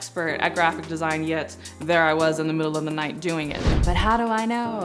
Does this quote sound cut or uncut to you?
cut